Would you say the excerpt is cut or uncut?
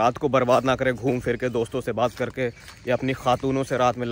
uncut